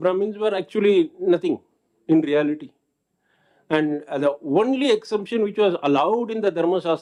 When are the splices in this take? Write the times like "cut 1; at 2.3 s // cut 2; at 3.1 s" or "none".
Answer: none